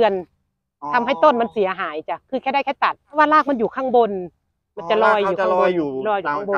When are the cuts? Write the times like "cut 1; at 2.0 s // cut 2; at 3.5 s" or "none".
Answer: none

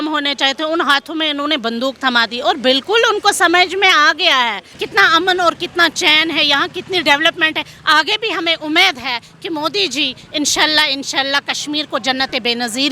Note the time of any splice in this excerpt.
cut 1; at 4.7 s

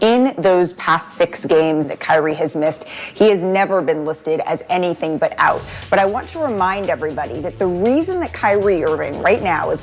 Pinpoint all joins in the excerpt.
cut 1; at 1.9 s

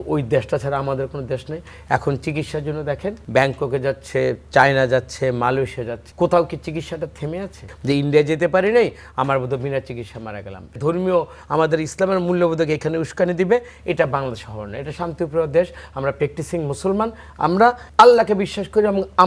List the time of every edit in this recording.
cut 1; at 3.2 s // cut 2; at 6.0 s // cut 3; at 7.7 s // cut 4; at 10.8 s // cut 5; at 17.8 s

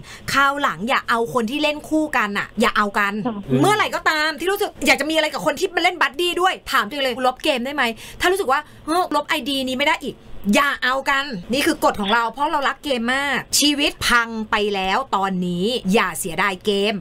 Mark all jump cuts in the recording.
cut 1; at 3.4 s // cut 2; at 7.2 s // cut 3; at 9.1 s // cut 4; at 11.3 s // cut 5; at 14.0 s // cut 6; at 15.8 s

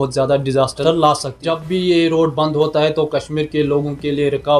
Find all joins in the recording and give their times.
cut 1; at 1.5 s

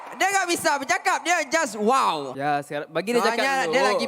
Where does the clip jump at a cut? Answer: cut 1; at 2.3 s

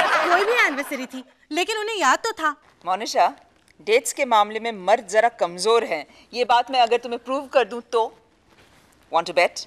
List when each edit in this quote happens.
none

